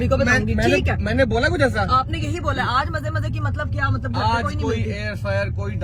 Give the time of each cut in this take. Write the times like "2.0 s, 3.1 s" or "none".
none